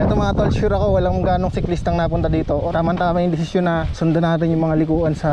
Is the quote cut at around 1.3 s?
no; 2 cuts; at 2.7 s, 3.9 s

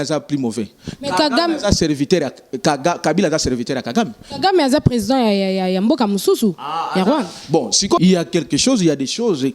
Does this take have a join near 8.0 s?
yes; 1 cut; at 8.0 s

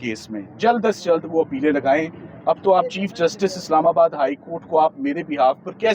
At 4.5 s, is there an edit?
no; 0 cuts

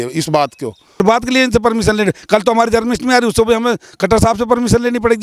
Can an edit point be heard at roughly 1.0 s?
yes; 1 cut; at 1.0 s

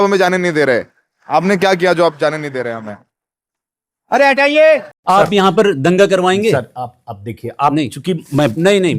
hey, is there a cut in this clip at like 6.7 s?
no; 1 cut; at 4.9 s

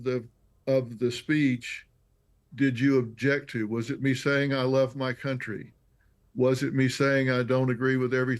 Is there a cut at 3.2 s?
no; 1 cut; at 5.6 s

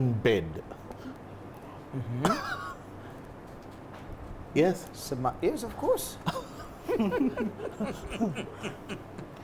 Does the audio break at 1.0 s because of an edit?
no; 0 cuts

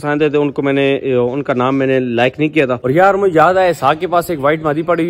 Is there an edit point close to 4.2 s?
no; 1 cut; at 2.8 s

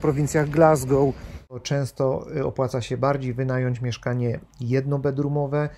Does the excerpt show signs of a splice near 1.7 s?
yes; 1 cut; at 1.7 s

